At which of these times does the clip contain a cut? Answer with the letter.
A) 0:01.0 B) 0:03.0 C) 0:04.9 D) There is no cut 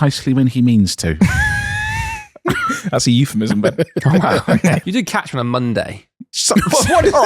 C